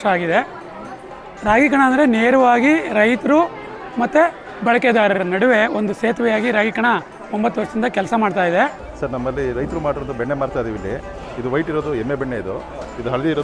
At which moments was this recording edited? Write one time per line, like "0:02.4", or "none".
0:08.9